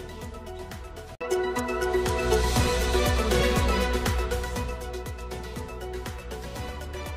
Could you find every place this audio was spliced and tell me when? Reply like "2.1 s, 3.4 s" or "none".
1.2 s, 6.0 s